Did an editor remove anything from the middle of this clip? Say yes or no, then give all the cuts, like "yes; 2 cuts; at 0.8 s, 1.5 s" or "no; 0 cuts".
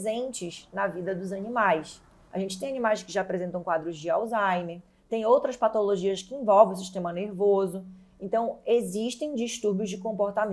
no; 0 cuts